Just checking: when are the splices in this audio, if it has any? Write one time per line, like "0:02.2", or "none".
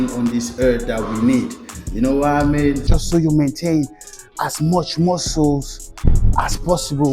0:02.9